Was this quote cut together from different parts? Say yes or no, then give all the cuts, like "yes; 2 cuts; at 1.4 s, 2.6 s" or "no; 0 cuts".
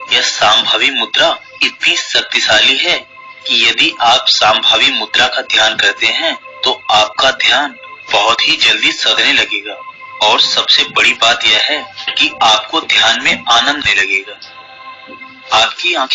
yes; 1 cut; at 13.8 s